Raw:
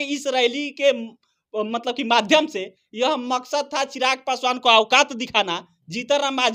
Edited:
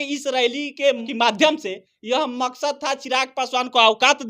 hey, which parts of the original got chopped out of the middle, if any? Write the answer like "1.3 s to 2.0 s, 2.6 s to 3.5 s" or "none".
1.1 s to 2.0 s